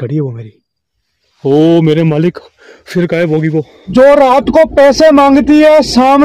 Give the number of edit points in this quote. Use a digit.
1